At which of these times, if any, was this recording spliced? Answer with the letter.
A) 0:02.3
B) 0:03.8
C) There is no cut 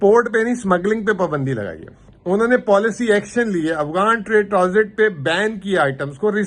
C